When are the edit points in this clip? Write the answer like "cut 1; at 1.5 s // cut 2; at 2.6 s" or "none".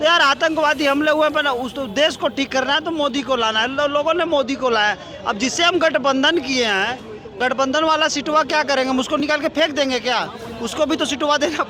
none